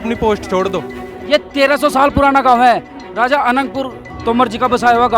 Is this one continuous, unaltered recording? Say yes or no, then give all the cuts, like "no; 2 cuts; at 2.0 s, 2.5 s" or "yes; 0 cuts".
no; 2 cuts; at 1.0 s, 4.0 s